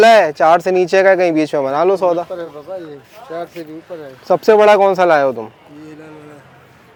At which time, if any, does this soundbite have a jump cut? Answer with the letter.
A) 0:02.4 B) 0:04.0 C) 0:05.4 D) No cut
D